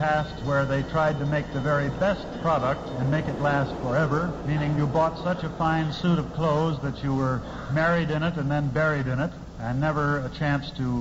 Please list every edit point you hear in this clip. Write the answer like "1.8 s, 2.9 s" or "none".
none